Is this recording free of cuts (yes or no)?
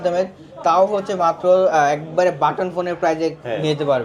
yes